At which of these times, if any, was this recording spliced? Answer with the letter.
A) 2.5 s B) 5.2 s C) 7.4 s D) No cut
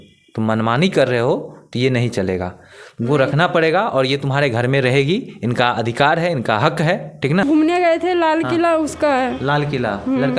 C